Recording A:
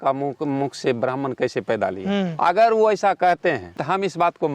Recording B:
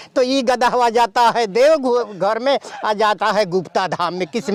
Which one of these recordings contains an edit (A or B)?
A